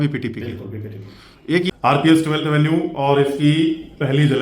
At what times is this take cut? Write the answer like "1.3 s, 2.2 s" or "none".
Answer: 1.7 s